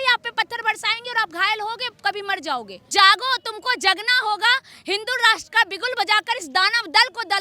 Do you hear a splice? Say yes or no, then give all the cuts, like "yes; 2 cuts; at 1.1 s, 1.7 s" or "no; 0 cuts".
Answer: yes; 1 cut; at 2.9 s